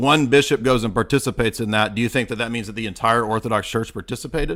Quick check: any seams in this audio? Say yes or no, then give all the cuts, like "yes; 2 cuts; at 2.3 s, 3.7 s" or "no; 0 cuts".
no; 0 cuts